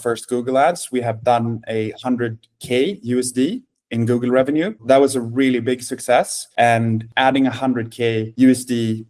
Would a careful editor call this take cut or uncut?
cut